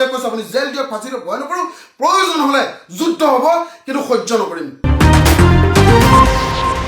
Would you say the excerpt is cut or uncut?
uncut